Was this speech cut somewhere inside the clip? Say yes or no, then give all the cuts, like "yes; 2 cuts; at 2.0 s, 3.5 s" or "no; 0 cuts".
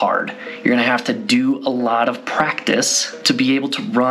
yes; 1 cut; at 3.0 s